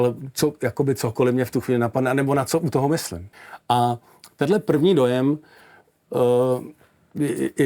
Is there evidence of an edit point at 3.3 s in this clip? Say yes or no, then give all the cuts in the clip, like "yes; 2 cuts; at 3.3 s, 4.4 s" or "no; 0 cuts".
yes; 1 cut; at 3.3 s